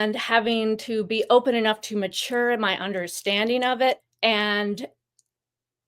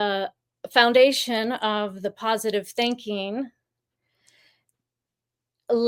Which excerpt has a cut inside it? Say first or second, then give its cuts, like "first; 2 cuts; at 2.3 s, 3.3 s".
first; 1 cut; at 4.0 s